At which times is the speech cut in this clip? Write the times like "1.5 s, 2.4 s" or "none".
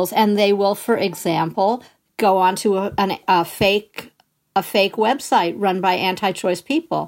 none